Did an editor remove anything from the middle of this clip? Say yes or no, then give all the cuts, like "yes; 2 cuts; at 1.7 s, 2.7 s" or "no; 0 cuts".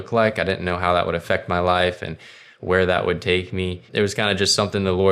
yes; 1 cut; at 3.8 s